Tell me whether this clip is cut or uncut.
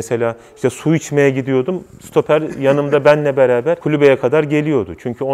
uncut